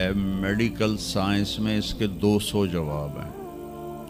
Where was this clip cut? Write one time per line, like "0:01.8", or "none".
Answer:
none